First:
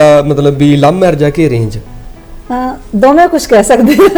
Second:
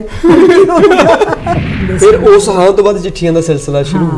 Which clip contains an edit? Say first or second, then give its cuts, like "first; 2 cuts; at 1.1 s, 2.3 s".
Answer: second; 1 cut; at 1.8 s